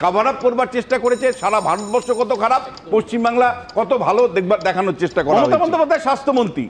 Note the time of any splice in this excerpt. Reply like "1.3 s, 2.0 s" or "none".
5.4 s